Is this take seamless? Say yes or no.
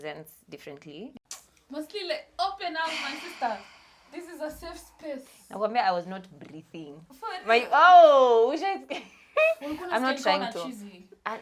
no